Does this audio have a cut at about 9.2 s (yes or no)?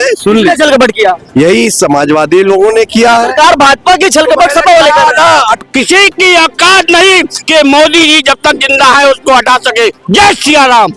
no